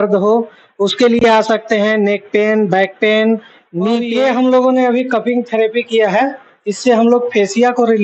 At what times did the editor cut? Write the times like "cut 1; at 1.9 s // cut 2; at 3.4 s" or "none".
cut 1; at 4.1 s